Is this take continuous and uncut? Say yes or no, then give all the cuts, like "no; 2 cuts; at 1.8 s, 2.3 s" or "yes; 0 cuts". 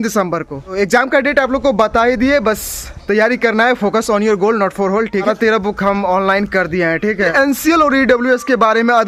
no; 3 cuts; at 0.7 s, 5.2 s, 7.3 s